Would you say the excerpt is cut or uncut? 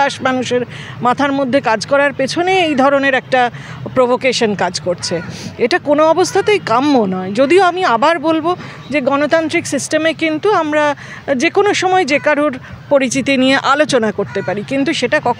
uncut